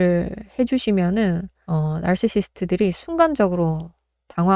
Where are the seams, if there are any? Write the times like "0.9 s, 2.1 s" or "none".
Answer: none

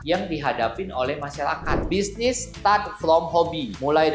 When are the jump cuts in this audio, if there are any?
1.7 s

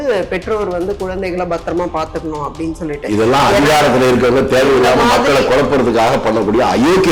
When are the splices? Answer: none

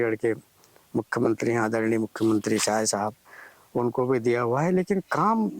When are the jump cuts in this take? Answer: 1.0 s

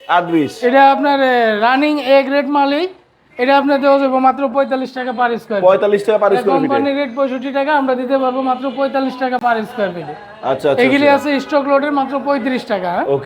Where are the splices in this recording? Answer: none

